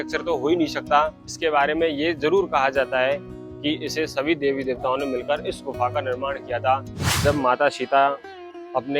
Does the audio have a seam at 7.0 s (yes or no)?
yes